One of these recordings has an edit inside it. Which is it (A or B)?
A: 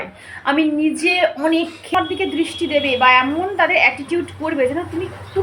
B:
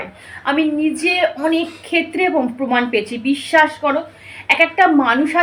A